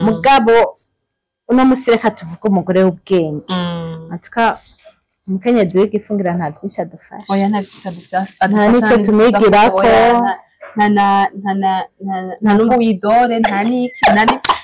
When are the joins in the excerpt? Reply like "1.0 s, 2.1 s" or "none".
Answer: none